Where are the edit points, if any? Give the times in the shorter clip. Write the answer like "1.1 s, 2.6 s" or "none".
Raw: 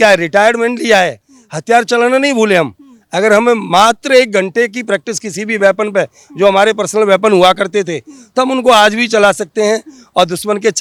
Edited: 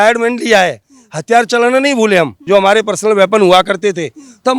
2.4 s